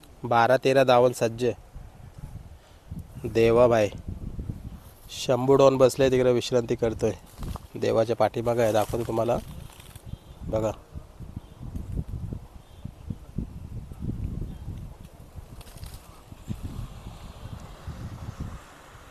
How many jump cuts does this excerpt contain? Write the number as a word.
zero